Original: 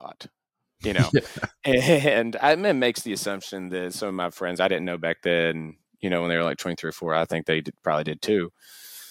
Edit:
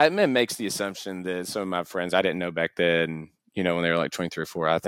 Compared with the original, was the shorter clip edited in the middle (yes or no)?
no